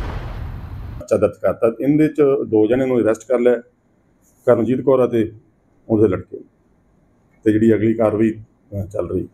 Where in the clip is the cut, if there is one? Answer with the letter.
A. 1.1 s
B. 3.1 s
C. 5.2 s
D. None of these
A